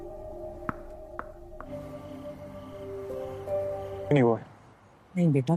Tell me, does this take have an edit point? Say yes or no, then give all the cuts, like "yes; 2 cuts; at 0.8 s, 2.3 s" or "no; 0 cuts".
yes; 1 cut; at 4.1 s